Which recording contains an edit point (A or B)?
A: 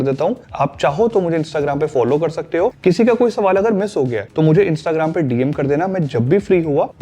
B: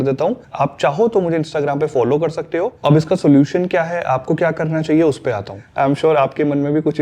B